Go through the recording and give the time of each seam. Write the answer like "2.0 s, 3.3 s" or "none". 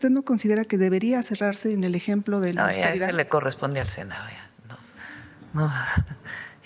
none